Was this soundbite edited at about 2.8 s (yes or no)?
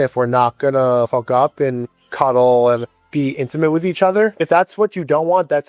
yes